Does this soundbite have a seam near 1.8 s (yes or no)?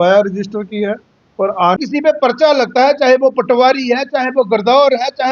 yes